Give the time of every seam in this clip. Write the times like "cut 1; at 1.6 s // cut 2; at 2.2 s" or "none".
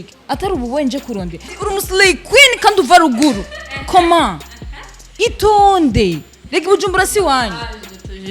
cut 1; at 1.4 s